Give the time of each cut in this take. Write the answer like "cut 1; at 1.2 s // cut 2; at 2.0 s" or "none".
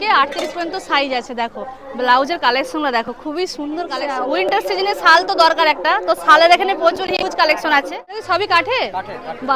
cut 1; at 4.0 s // cut 2; at 8.2 s